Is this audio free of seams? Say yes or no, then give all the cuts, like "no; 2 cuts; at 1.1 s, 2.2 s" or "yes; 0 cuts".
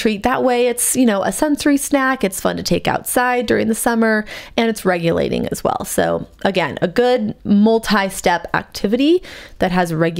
yes; 0 cuts